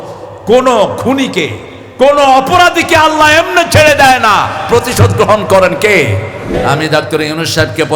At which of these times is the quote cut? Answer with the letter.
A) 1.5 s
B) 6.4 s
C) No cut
B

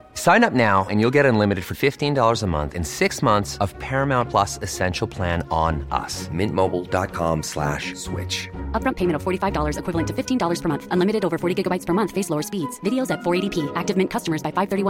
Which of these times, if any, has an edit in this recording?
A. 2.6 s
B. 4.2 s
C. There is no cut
C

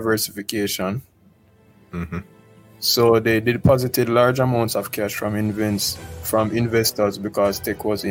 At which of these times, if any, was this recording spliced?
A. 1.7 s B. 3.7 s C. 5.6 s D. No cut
D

